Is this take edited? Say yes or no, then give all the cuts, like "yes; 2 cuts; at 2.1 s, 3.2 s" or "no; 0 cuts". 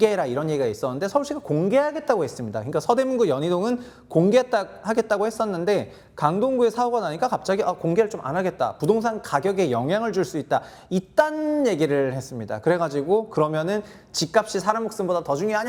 no; 0 cuts